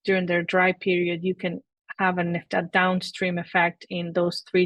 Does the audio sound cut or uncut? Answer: cut